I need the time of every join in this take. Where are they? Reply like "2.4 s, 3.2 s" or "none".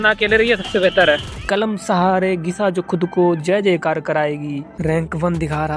1.3 s, 4.7 s